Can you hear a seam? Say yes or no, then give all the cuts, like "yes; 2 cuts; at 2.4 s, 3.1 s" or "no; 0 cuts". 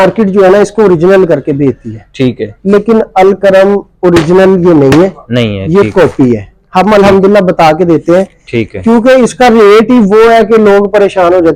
no; 0 cuts